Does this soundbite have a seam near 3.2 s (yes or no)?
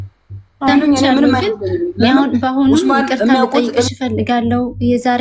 no